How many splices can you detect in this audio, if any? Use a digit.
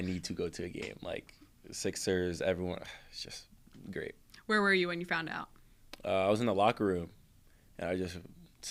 0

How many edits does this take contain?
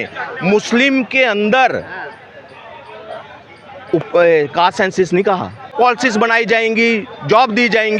1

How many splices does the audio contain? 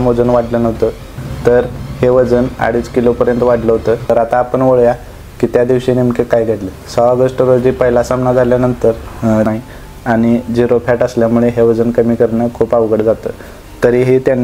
2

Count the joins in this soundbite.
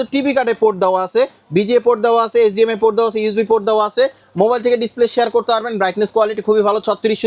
0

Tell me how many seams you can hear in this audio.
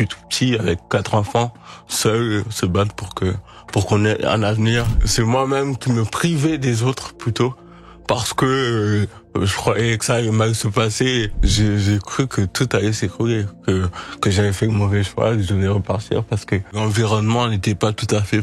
3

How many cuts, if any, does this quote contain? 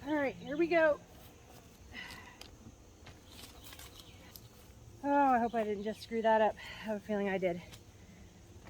1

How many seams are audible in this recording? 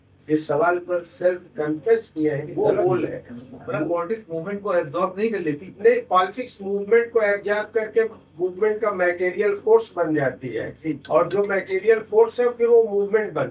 1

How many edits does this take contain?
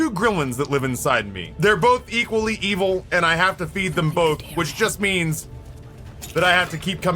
1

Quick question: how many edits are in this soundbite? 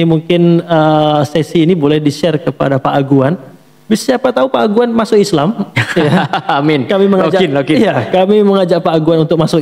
0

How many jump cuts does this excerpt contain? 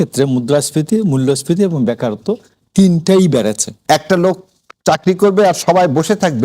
1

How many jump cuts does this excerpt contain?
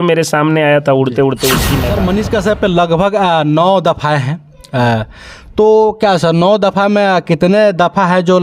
1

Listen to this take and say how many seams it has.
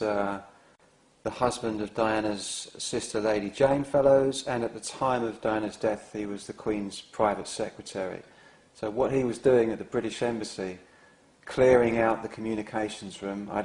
0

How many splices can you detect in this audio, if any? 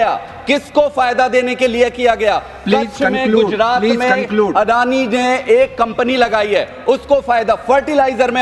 0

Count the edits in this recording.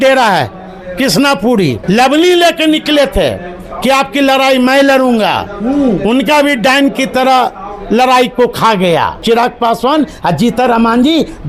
2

